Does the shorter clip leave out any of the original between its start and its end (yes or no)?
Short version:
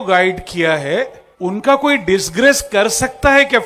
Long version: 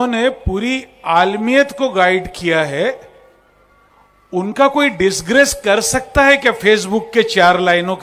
yes